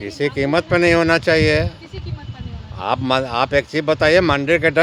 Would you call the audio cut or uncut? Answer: uncut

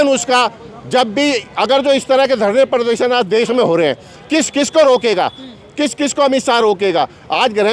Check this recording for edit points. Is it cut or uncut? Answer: uncut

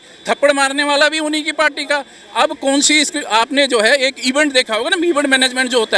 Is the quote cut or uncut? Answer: uncut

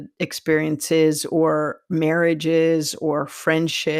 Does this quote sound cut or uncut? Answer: uncut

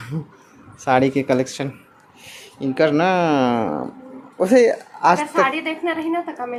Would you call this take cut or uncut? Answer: uncut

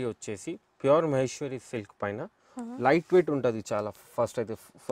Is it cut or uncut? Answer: uncut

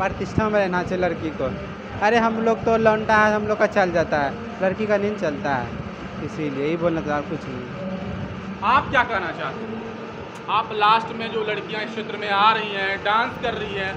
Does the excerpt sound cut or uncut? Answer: uncut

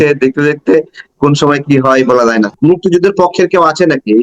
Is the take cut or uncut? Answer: cut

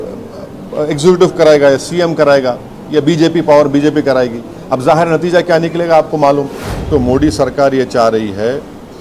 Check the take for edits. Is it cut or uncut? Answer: cut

